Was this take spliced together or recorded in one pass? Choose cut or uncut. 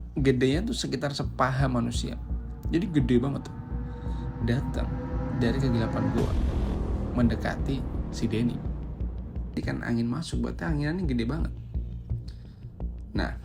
cut